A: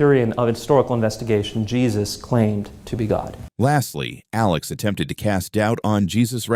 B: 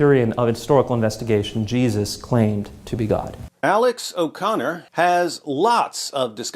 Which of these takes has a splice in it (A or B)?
B